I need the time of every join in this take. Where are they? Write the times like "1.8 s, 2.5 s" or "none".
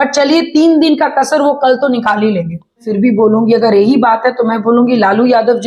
2.9 s